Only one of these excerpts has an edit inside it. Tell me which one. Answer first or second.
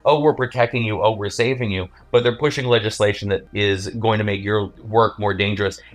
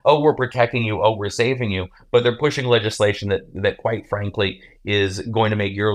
first